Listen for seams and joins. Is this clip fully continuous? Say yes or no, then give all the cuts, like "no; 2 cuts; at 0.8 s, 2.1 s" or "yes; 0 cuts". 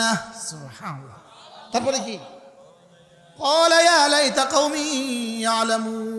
yes; 0 cuts